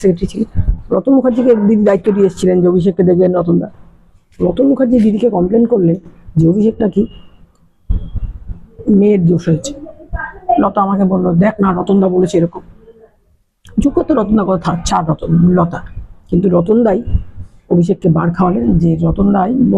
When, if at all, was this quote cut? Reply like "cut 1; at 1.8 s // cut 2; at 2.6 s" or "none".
none

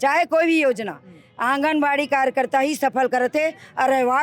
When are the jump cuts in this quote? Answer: none

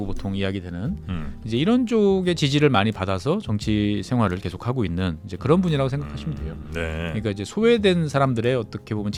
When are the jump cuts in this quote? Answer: none

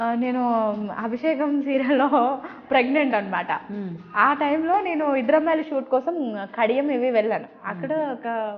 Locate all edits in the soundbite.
none

